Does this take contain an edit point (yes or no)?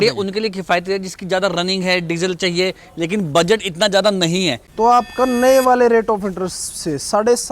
yes